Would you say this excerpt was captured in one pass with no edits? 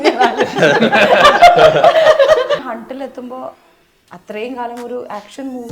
no; 1 cut; at 2.7 s

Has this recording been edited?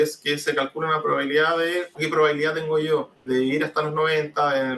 yes; 2 cuts; at 2.0 s, 3.1 s

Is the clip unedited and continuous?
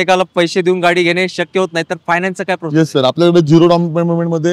yes; 0 cuts

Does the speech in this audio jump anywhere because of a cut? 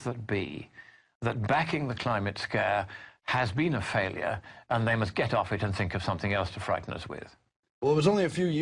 no; 0 cuts

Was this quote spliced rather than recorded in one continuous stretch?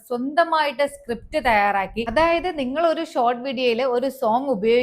yes; 1 cut; at 2.0 s

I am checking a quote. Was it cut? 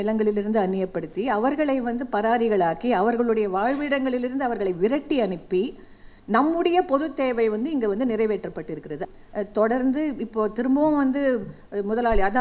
yes; 1 cut; at 9.0 s

